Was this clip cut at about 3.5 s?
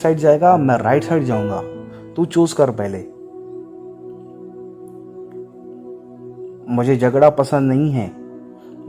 yes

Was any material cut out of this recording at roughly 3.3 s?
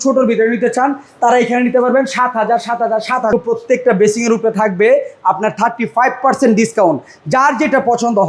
yes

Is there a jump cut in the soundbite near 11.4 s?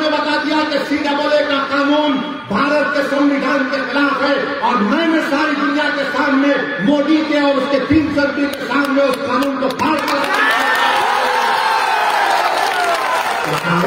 no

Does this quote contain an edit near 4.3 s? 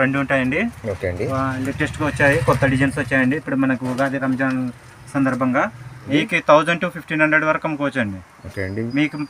no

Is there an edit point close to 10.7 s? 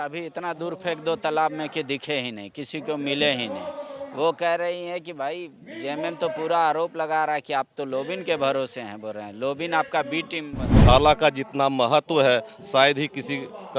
yes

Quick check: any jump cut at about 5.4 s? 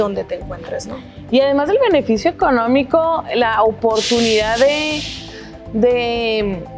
no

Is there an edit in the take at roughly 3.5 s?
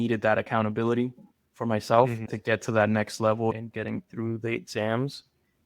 yes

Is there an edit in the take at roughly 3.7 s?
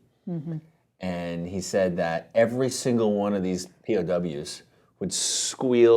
yes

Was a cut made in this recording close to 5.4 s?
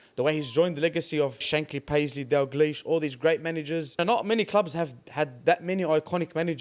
no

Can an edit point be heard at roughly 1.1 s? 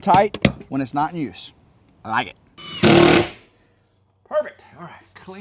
no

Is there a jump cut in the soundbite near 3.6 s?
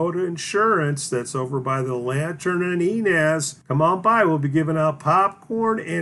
yes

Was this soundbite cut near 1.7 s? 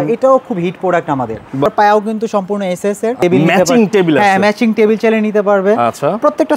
yes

